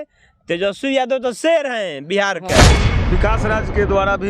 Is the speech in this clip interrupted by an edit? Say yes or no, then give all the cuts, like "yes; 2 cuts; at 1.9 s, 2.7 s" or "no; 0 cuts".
yes; 1 cut; at 2.9 s